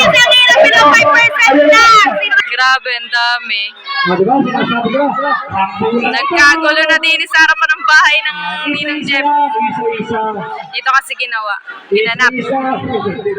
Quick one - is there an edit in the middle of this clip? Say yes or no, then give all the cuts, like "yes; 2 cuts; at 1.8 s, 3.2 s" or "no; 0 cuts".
yes; 1 cut; at 2.3 s